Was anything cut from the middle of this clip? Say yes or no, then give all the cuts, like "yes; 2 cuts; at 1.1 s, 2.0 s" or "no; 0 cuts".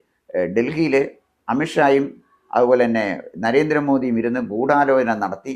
no; 0 cuts